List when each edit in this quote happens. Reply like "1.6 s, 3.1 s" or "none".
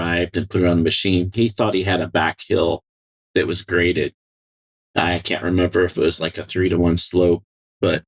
1.3 s